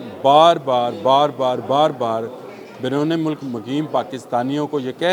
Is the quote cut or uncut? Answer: uncut